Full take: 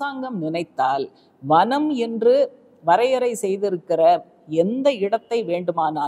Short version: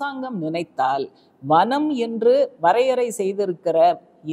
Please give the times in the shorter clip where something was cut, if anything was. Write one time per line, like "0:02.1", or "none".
0:02.5